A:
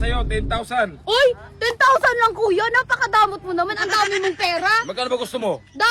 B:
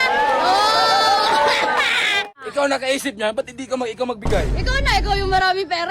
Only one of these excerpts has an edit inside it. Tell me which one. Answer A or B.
B